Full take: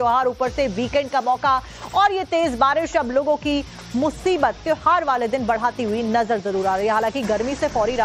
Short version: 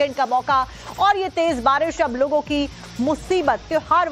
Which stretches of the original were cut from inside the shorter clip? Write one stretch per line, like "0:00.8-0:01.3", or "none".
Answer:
none